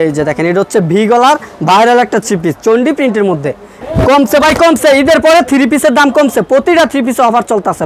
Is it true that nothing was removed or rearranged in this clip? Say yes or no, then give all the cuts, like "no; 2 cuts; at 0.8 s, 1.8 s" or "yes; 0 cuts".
no; 1 cut; at 3.7 s